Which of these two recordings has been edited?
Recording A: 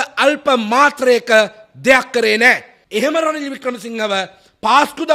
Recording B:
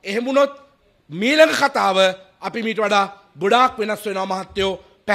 A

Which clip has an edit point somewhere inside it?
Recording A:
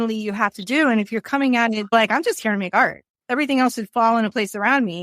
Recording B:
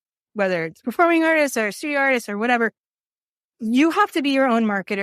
A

